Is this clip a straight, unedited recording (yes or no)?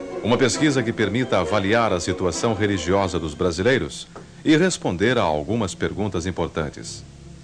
no